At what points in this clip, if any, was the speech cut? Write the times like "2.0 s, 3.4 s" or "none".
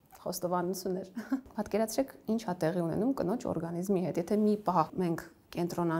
1.5 s